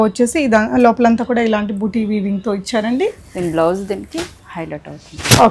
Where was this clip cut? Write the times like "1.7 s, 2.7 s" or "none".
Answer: none